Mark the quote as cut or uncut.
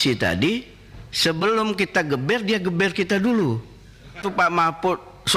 cut